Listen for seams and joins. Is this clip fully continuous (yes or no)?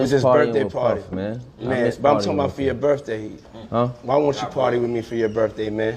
yes